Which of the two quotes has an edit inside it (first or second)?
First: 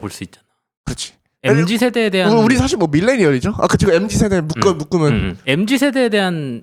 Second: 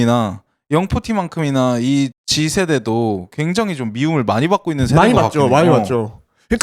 second